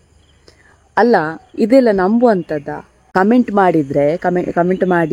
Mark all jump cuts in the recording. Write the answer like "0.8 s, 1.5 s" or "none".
3.1 s